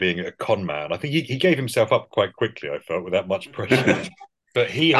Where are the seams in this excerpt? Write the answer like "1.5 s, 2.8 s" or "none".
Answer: none